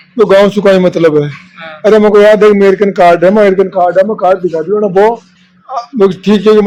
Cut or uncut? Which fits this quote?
uncut